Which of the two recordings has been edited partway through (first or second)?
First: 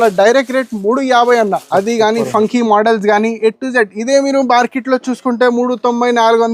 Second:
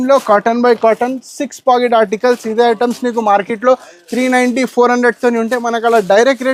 first